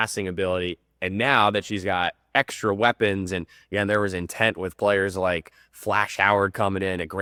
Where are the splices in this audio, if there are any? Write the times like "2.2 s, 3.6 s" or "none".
none